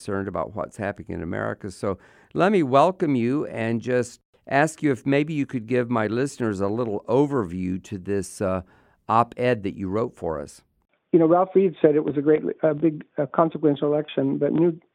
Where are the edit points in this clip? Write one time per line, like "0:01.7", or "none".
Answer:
none